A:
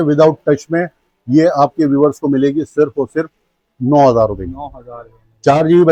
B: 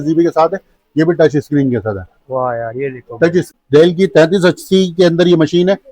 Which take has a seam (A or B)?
B